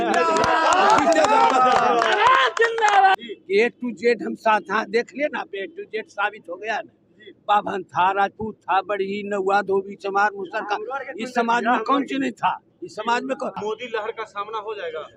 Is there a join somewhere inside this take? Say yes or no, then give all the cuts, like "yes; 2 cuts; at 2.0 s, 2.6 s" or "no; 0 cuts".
yes; 2 cuts; at 3.1 s, 13.6 s